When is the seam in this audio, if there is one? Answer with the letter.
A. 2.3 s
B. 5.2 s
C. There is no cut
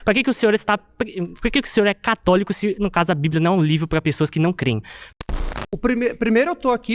B